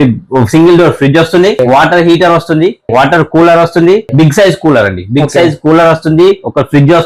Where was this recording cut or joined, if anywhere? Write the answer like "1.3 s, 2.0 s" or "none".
1.6 s, 2.8 s, 4.1 s